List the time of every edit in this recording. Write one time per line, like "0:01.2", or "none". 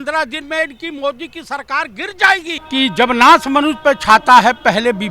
0:02.6